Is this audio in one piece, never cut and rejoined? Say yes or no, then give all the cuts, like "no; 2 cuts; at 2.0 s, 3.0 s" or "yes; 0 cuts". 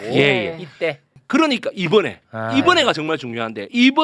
no; 1 cut; at 1.1 s